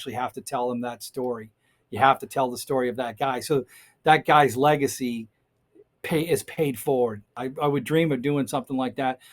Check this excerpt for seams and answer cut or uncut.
cut